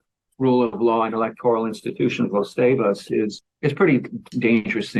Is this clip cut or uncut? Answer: uncut